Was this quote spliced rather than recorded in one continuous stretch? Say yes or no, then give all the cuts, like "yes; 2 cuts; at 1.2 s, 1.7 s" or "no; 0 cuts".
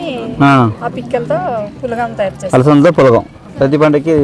no; 0 cuts